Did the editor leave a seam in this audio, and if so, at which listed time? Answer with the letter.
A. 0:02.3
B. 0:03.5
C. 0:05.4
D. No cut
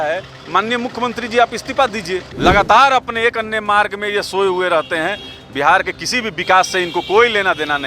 A